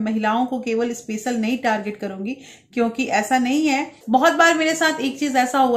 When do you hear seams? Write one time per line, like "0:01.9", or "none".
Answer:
0:03.9